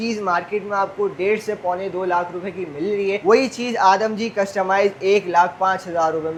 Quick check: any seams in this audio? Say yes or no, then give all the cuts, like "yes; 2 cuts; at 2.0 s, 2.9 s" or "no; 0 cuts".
no; 0 cuts